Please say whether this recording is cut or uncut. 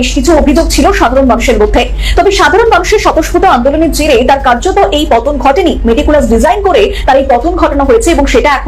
uncut